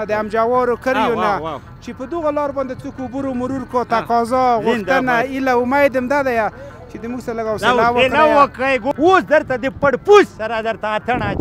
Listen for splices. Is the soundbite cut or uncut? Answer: cut